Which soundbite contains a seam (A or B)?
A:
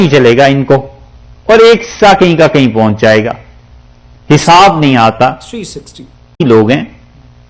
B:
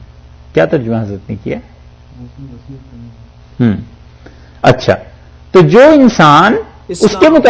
A